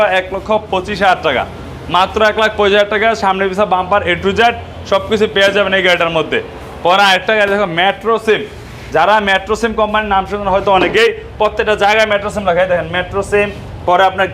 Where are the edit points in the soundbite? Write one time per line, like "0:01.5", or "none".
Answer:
none